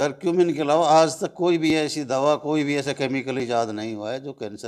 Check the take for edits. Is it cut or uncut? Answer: uncut